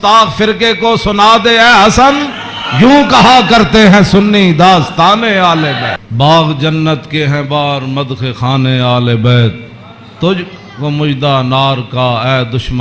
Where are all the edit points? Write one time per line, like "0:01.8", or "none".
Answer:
0:06.1